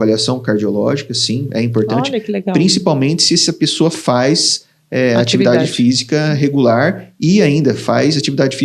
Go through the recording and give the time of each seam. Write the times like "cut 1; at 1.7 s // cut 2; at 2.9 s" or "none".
none